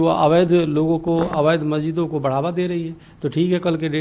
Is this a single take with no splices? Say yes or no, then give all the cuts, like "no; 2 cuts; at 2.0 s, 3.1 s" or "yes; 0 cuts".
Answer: yes; 0 cuts